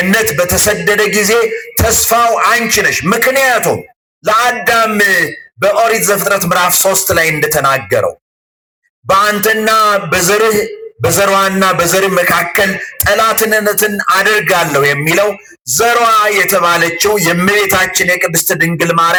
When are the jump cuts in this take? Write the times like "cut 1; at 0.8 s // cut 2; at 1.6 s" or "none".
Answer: none